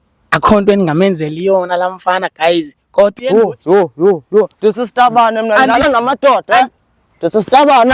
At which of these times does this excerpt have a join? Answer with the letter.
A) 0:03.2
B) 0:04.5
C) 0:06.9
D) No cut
A